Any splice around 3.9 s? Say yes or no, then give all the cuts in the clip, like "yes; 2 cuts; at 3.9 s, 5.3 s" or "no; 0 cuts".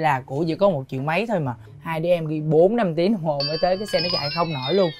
no; 1 cut; at 1.5 s